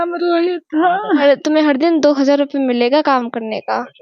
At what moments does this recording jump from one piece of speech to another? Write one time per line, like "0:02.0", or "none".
0:01.0